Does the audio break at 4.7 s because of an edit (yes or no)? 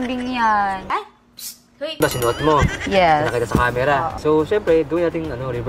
no